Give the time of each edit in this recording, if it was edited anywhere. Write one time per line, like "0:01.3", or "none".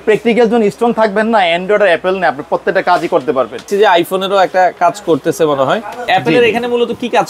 0:03.7
0:06.0